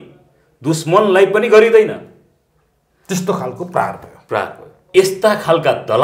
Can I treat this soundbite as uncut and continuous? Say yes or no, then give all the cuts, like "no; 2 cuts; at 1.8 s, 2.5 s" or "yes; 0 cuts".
no; 1 cut; at 4.9 s